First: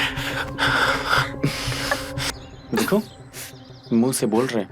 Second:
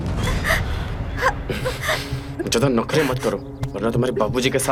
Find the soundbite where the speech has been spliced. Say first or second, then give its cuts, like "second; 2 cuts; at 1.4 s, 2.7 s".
first; 1 cut; at 2.3 s